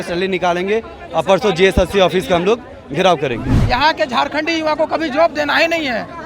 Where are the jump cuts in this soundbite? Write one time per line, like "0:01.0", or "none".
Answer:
0:03.5